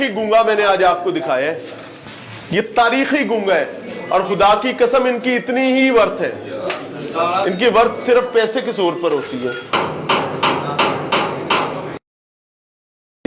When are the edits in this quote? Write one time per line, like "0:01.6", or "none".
0:10.0